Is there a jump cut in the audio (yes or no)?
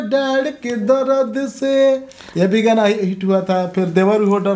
no